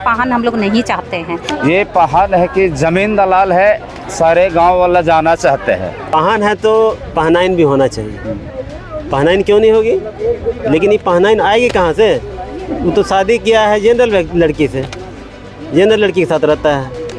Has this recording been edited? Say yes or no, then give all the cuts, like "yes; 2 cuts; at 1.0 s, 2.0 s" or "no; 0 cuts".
yes; 2 cuts; at 1.5 s, 6.1 s